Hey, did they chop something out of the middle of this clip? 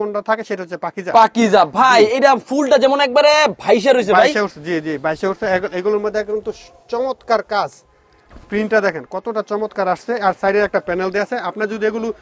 no; 0 cuts

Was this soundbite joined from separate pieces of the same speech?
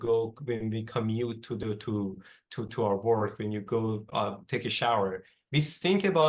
no; 0 cuts

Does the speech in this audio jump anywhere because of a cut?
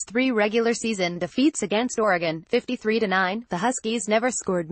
no; 0 cuts

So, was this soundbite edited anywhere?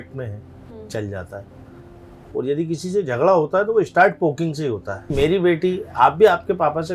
yes; 1 cut; at 5.1 s

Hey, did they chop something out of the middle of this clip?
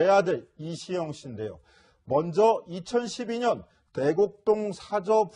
no; 0 cuts

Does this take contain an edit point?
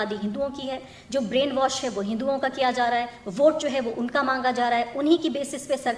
no; 0 cuts

